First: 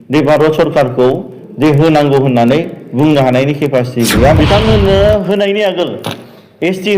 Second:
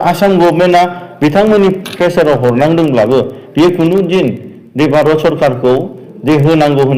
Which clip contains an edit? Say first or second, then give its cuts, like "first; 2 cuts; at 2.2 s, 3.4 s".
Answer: first; 1 cut; at 4.4 s